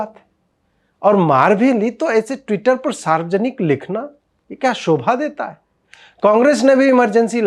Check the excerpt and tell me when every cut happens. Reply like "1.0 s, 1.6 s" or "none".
none